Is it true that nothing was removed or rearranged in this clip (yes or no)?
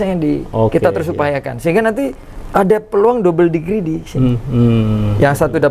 yes